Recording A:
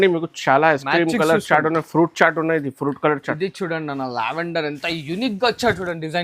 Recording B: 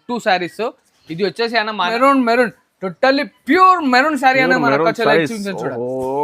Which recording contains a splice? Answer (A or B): B